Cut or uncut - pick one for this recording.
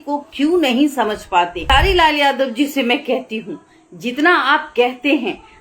cut